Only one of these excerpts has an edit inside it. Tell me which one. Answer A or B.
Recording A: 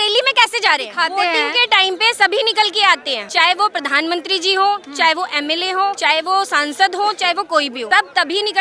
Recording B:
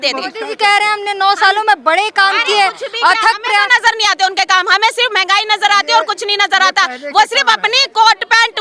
A